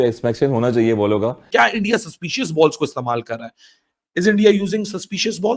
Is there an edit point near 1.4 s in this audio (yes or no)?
yes